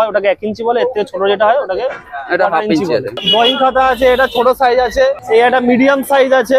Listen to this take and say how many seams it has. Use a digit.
2